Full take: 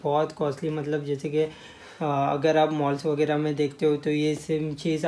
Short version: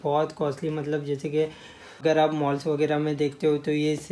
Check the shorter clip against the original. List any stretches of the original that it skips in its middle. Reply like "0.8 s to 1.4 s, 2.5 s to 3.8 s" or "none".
2.0 s to 2.4 s

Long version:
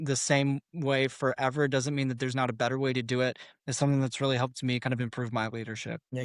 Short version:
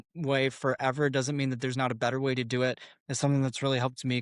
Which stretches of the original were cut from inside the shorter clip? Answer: none

